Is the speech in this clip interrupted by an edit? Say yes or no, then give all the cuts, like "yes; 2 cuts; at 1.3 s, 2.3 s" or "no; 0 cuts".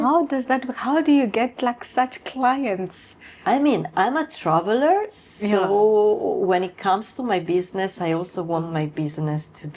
no; 0 cuts